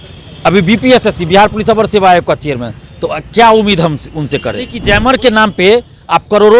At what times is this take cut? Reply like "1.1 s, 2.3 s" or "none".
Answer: 4.8 s